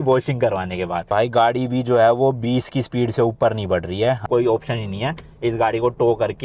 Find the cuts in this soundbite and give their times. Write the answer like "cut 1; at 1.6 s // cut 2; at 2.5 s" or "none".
cut 1; at 1.0 s // cut 2; at 4.3 s

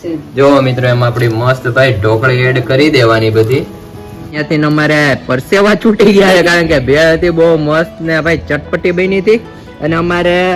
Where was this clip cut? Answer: cut 1; at 4.3 s

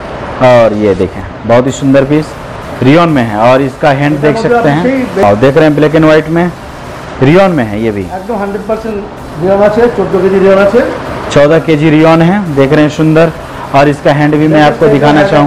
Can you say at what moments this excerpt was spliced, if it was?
cut 1; at 5.2 s

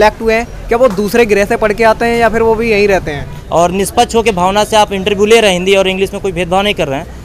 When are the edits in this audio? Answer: cut 1; at 3.4 s

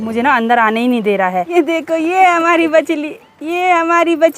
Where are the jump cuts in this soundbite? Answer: cut 1; at 1.5 s

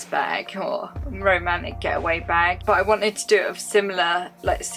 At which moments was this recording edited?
none

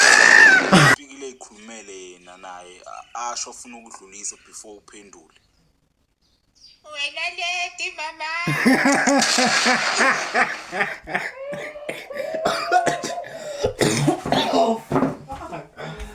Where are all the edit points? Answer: cut 1; at 0.9 s

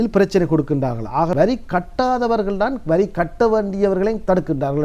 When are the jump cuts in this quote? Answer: cut 1; at 1.3 s

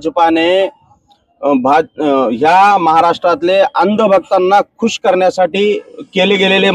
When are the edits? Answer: none

